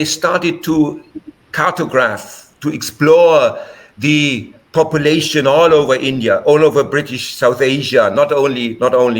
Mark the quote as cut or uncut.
uncut